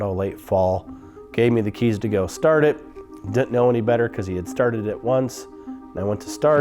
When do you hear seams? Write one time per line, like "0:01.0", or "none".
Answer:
0:00.9

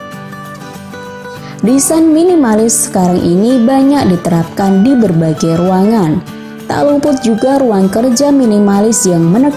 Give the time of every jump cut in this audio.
0:01.6

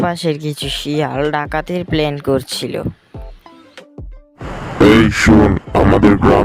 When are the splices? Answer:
0:04.1

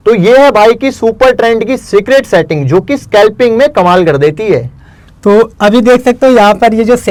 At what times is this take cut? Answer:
none

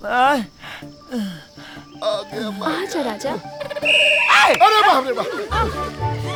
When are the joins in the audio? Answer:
none

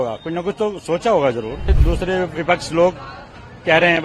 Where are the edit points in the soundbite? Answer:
0:01.8

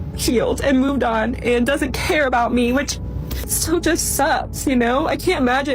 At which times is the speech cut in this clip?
0:03.6

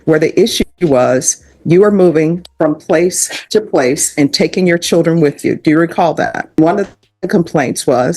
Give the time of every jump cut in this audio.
0:06.6

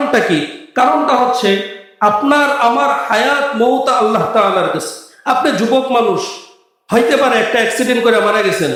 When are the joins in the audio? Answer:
none

